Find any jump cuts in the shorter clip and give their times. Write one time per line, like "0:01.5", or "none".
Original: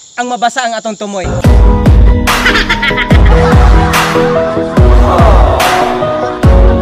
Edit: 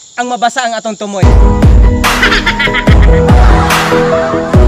0:01.2

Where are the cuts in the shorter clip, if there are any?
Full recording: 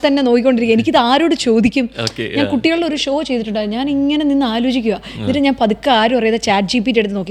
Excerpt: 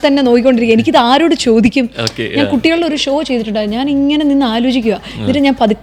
none

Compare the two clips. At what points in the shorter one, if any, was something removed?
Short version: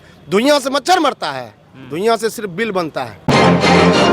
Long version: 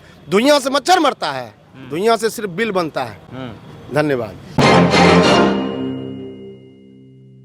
0:03.1

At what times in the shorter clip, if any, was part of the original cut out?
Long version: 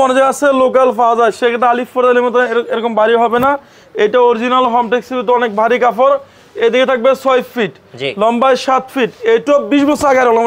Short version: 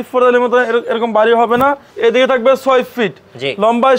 0:01.9

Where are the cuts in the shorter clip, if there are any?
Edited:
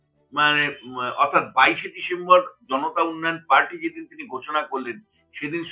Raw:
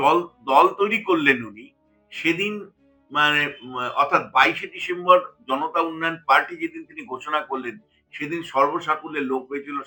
none

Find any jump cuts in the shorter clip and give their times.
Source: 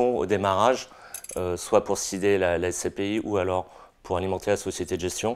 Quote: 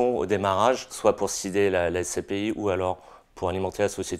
0:00.9

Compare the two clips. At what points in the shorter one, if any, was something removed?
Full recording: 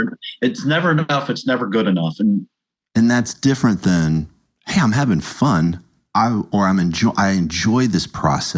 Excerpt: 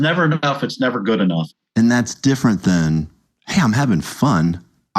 0:01.4

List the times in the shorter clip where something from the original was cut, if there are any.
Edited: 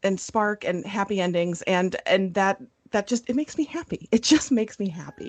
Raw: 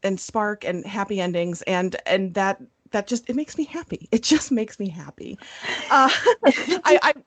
none

